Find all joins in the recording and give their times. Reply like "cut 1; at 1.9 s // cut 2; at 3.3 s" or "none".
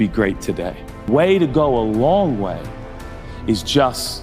cut 1; at 1.1 s

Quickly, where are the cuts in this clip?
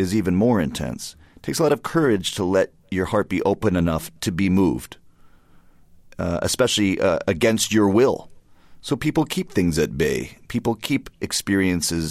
cut 1; at 3.6 s

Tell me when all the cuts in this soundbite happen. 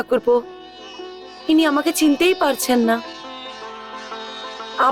none

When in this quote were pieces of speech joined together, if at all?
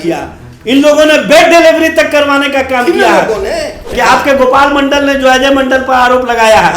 cut 1; at 3.9 s

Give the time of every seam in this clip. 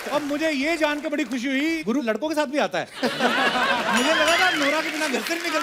none

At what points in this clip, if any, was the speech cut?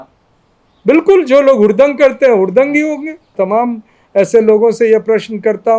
cut 1; at 3.3 s

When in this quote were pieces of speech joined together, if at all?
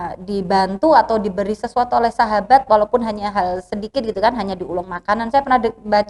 none

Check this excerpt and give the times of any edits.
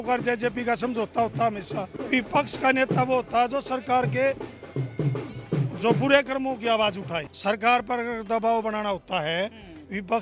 cut 1; at 2.0 s // cut 2; at 7.3 s

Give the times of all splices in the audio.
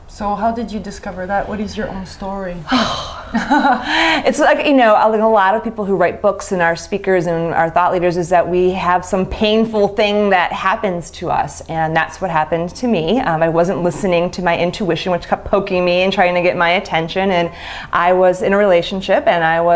cut 1; at 9.4 s

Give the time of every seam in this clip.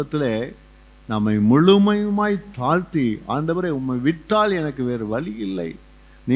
none

